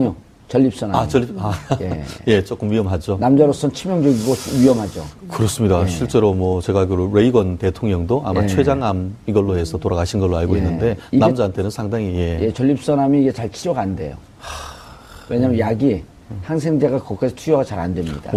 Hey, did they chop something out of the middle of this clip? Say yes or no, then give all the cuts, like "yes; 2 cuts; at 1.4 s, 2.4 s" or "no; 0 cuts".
no; 0 cuts